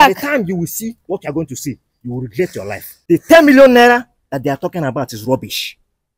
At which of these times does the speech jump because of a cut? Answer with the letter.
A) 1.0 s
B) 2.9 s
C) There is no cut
B